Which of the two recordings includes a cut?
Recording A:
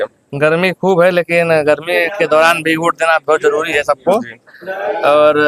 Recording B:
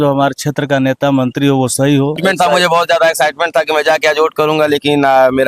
B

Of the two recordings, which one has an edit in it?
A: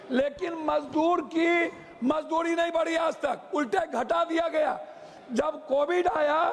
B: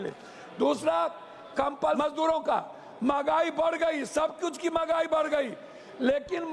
B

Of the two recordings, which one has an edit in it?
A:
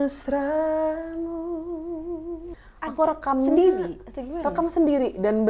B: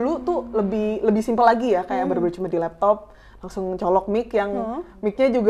A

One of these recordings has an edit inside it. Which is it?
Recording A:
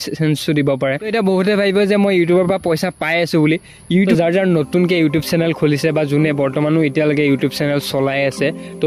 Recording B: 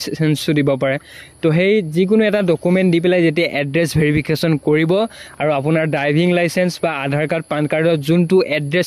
A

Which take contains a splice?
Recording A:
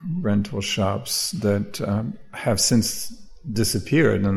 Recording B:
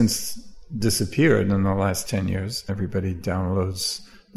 B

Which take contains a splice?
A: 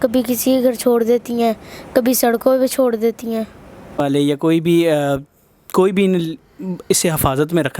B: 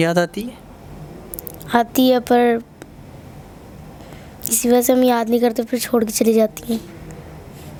A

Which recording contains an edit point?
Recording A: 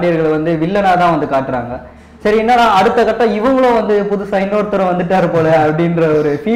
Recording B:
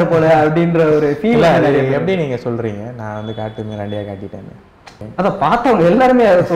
B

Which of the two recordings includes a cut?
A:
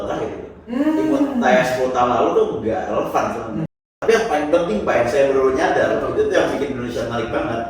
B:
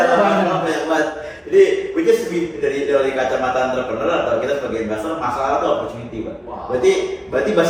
A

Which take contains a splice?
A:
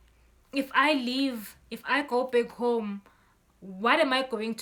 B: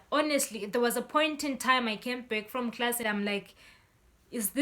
B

